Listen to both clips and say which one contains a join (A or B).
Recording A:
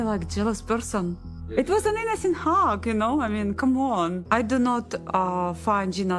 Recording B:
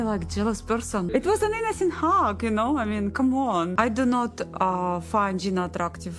B